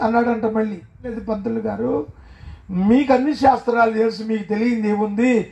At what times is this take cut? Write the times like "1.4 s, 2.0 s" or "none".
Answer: 1.1 s